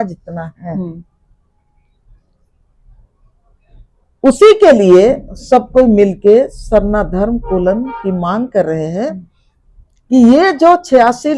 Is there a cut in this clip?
no; 0 cuts

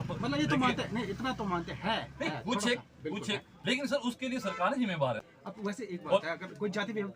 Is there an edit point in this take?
yes; 1 cut; at 5.3 s

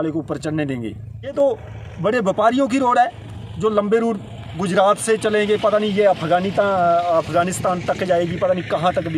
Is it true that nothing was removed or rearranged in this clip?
no; 1 cut; at 1.3 s

